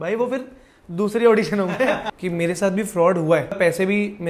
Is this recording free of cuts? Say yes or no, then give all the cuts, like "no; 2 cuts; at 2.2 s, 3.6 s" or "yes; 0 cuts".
no; 2 cuts; at 2.1 s, 3.6 s